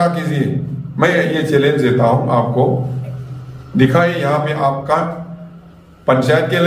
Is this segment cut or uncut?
uncut